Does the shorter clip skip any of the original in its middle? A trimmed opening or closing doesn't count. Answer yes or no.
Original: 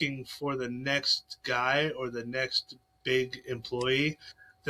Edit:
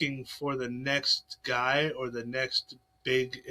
no